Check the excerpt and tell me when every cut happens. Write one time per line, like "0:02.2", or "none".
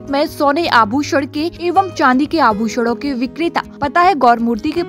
0:01.5
0:03.7